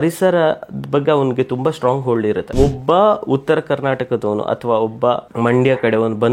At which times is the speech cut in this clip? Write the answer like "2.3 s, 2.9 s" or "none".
2.5 s, 5.3 s